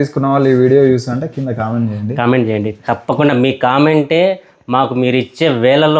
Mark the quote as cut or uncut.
uncut